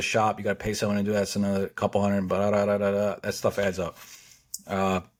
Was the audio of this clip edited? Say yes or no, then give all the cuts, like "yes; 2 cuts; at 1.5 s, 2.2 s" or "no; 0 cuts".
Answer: no; 0 cuts